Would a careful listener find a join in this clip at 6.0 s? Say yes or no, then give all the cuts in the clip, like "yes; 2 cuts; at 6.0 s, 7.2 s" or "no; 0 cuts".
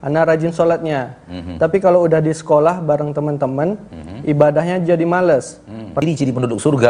yes; 1 cut; at 6.0 s